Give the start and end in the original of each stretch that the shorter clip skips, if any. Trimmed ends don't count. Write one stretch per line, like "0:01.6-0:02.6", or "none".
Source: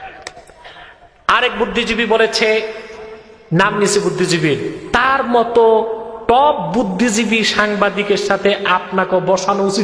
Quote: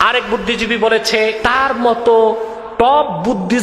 0:02.7-0:04.9